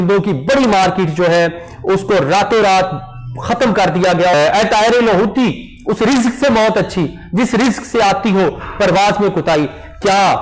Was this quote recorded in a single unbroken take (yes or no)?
no